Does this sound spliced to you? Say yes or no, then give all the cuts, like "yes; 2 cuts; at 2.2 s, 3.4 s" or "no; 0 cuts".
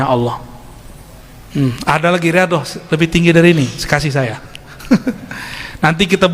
no; 0 cuts